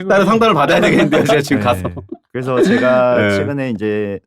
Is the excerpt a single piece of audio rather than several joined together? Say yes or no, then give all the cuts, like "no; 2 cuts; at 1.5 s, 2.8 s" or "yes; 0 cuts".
yes; 0 cuts